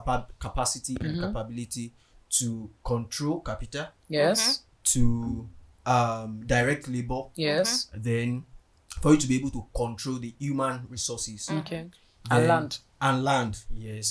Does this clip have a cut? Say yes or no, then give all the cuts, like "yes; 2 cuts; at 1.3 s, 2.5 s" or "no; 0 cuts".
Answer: no; 0 cuts